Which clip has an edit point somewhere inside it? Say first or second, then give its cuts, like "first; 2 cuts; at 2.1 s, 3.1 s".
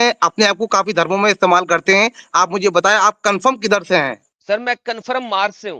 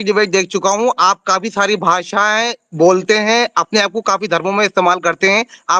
first; 1 cut; at 4.3 s